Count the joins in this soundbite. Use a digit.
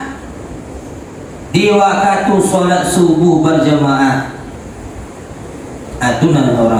0